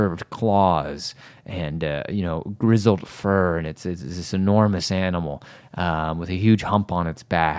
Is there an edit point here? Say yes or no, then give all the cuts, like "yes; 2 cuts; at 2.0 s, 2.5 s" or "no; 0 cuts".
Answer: no; 0 cuts